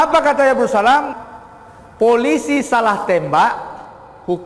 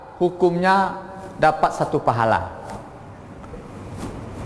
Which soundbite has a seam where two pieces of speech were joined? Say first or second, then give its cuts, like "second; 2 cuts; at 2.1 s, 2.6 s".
first; 1 cut; at 1.1 s